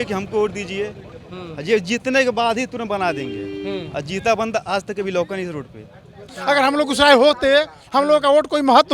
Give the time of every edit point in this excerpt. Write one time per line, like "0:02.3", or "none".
0:06.3